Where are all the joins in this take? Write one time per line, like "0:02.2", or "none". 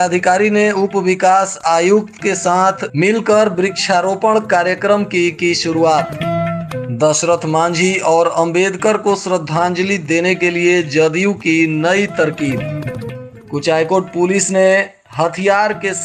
none